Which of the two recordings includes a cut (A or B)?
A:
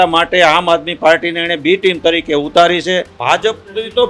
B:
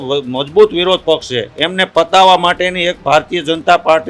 A